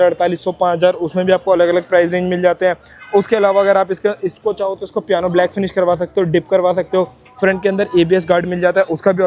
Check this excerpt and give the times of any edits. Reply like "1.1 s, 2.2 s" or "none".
none

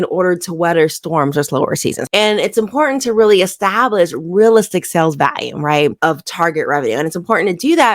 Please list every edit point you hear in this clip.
2.0 s

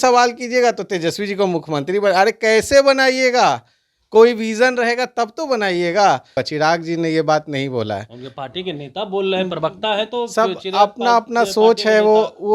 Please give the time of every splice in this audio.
6.4 s

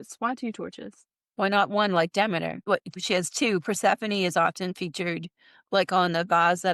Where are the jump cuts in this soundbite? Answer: 3.0 s

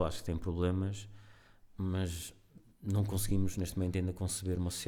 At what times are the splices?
none

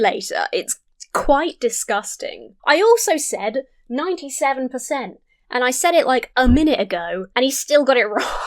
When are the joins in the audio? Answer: 6.3 s, 7.2 s

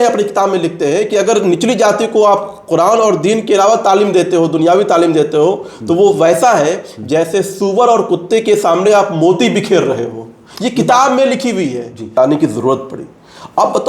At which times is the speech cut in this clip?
12.1 s

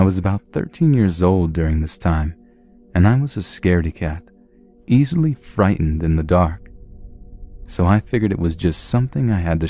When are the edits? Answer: none

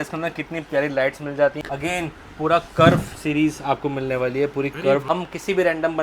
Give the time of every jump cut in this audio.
1.6 s, 5.0 s

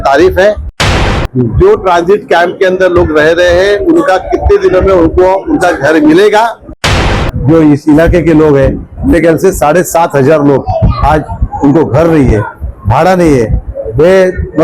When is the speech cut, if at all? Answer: 1.0 s, 7.0 s

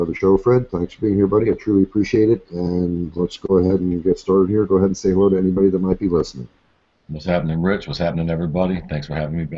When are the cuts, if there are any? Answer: 5.0 s

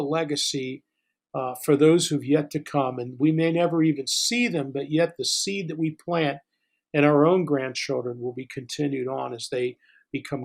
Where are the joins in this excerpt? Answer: none

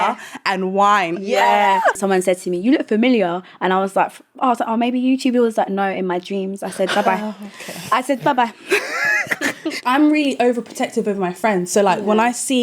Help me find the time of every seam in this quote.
2.0 s, 9.8 s

